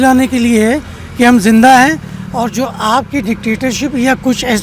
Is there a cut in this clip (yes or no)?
no